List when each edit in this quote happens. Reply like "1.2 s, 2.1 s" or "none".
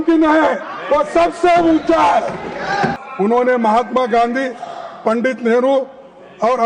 3.0 s